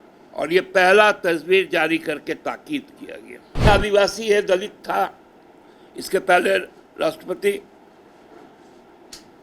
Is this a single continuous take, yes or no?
no